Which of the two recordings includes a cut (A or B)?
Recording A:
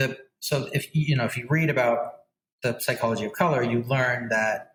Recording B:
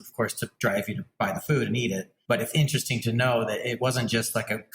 B